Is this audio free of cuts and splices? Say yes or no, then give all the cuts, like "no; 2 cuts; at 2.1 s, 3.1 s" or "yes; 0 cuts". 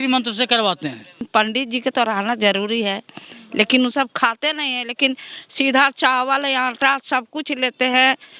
no; 1 cut; at 1.2 s